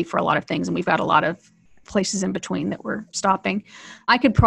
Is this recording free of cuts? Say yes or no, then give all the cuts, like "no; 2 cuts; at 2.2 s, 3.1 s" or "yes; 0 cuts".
no; 1 cut; at 3.5 s